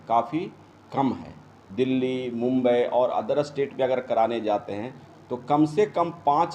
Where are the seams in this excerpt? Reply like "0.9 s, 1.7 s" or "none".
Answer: 1.7 s